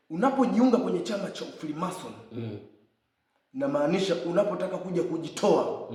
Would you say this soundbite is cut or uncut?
uncut